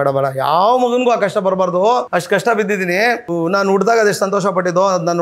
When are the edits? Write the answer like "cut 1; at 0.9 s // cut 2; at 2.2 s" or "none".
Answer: cut 1; at 2.1 s // cut 2; at 3.3 s